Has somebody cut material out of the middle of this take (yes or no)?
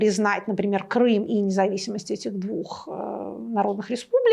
no